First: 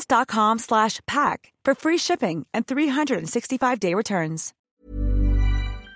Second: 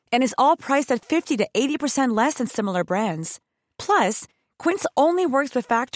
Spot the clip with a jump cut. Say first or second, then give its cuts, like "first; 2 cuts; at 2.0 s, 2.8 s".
first; 1 cut; at 4.6 s